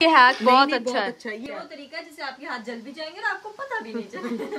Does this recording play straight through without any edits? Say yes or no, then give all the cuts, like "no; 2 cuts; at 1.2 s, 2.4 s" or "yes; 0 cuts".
no; 1 cut; at 1.4 s